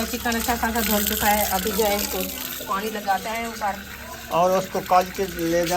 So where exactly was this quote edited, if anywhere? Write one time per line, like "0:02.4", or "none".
none